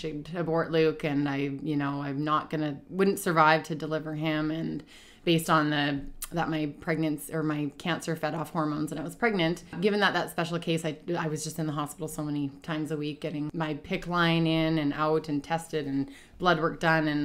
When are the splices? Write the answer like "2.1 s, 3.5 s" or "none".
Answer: 9.8 s, 13.5 s